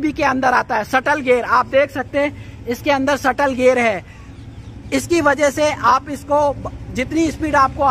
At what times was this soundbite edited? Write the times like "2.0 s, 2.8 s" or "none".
none